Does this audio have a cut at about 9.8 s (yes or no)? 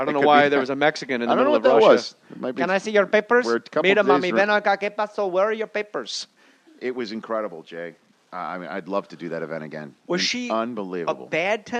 no